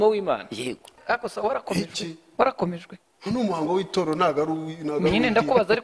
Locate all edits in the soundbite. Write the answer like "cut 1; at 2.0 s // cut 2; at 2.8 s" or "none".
cut 1; at 0.9 s

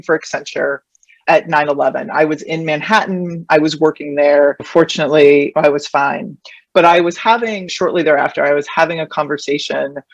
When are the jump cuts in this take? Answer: cut 1; at 7.7 s

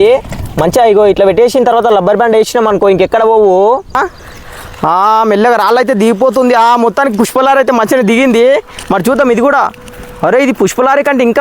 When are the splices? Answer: cut 1; at 4.0 s

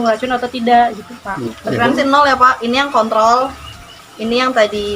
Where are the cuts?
cut 1; at 1.5 s

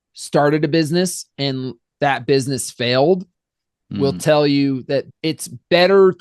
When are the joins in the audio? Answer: cut 1; at 1.8 s // cut 2; at 5.1 s

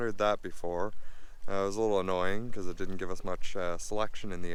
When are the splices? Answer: none

